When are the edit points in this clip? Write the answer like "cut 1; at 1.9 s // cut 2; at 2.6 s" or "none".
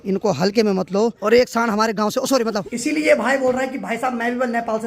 cut 1; at 1.2 s // cut 2; at 2.8 s